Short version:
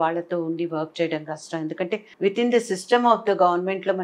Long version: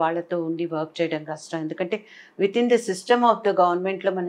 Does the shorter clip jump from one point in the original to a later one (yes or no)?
yes